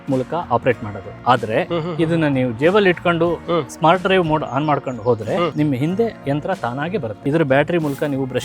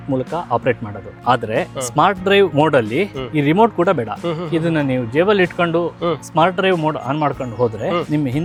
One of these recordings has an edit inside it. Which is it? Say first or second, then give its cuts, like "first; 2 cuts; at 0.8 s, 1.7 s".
first; 2 cuts; at 1.7 s, 7.2 s